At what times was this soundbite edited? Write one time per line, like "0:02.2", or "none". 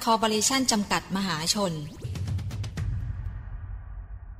0:02.1